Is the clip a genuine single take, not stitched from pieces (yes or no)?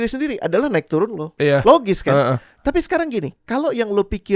yes